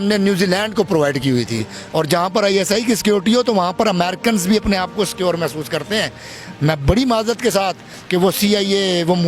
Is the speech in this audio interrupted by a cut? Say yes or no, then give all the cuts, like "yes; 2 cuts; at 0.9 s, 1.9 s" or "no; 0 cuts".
yes; 1 cut; at 1.8 s